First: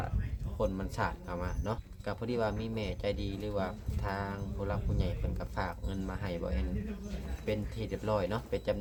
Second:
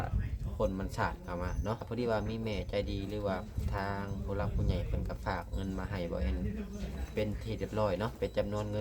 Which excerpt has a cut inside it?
second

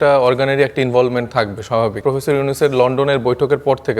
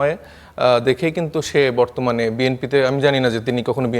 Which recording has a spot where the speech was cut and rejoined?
first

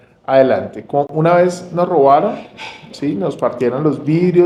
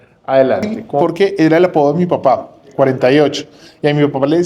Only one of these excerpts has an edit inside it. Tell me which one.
second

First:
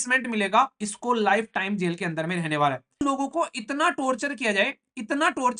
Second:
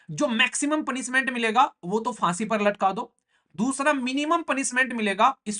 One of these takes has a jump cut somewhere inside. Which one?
first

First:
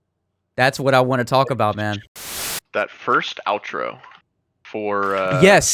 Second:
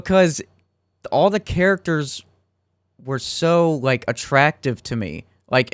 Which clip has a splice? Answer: first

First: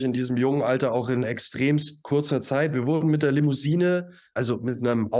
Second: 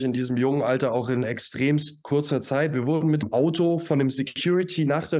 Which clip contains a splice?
second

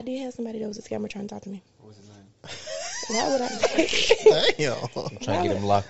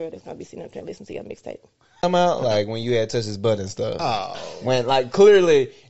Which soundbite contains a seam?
second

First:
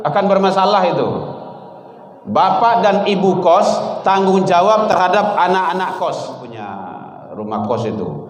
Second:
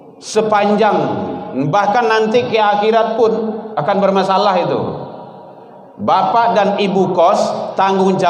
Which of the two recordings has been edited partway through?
first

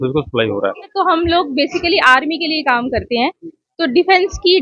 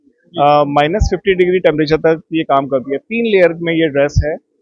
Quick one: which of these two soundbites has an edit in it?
first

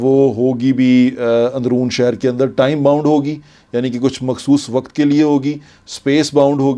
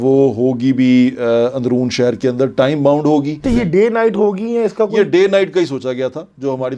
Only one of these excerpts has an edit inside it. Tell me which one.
second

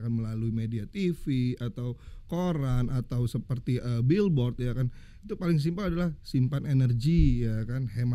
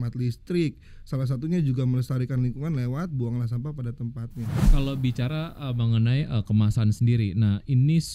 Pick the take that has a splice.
second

